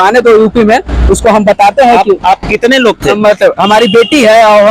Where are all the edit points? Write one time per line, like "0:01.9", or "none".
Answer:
0:03.2